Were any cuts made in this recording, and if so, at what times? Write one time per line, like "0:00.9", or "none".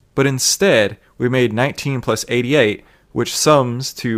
none